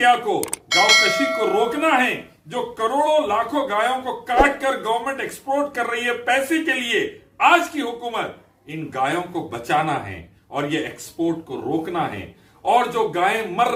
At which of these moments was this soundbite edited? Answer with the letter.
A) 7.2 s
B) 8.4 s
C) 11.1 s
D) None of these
D